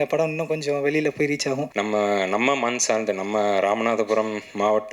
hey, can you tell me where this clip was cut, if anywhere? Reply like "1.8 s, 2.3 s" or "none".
1.7 s